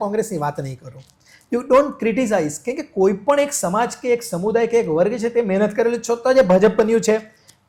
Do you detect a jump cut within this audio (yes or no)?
no